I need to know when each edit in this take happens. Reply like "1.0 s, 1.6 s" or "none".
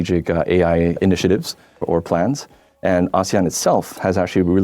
0.9 s